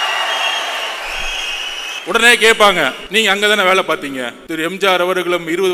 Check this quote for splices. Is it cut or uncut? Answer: cut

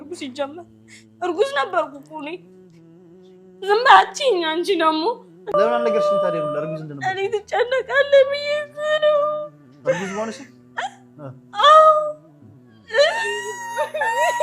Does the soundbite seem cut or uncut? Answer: cut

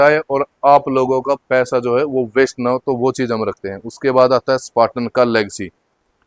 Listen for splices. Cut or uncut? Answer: uncut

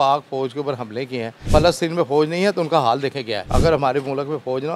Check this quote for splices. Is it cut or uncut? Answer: cut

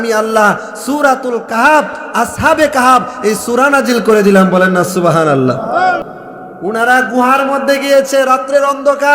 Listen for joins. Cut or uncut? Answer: cut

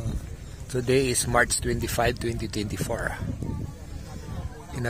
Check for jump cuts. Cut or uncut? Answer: uncut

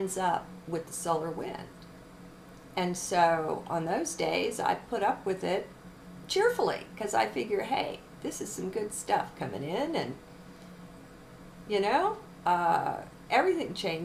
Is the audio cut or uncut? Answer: uncut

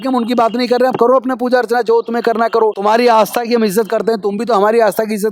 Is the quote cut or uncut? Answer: cut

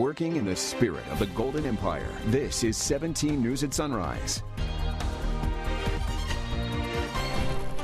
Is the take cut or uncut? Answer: uncut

